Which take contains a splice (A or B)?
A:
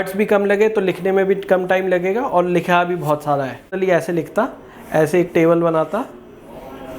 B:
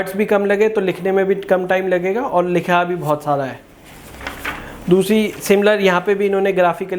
A